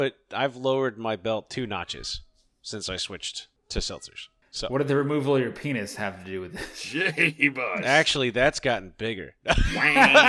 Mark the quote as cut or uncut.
uncut